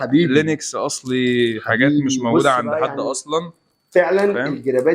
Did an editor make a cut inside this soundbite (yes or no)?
no